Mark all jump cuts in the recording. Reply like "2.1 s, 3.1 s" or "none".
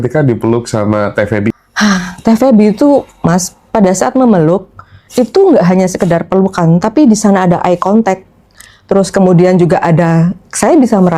1.6 s